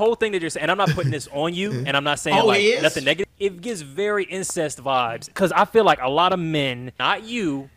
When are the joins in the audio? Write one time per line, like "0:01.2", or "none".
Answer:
0:03.2
0:05.3
0:06.9